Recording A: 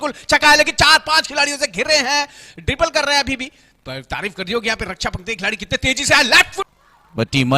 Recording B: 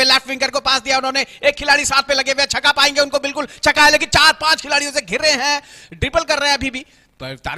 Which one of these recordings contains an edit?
A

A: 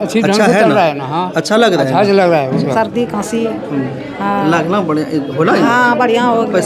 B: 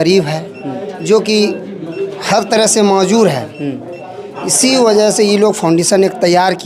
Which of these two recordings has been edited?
A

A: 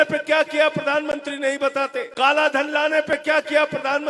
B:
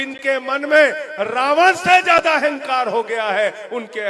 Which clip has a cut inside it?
A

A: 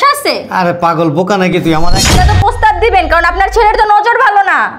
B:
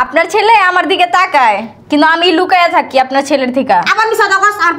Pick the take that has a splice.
A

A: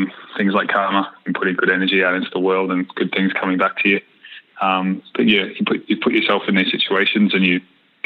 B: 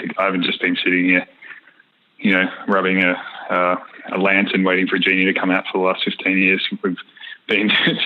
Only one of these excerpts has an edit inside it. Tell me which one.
A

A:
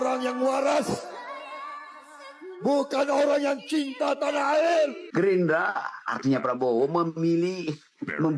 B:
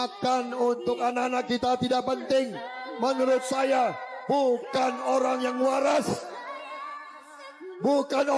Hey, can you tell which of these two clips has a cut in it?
A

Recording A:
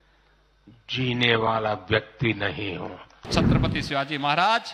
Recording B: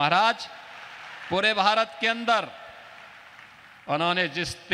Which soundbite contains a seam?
A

